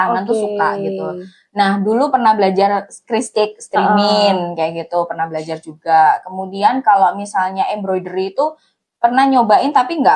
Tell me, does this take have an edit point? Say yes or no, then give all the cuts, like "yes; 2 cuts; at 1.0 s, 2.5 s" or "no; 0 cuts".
no; 0 cuts